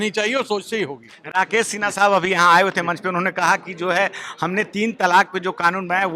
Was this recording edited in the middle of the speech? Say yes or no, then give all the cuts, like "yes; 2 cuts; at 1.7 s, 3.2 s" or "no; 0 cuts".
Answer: no; 0 cuts